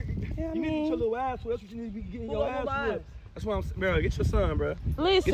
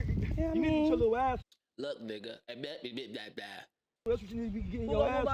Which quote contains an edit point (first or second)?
first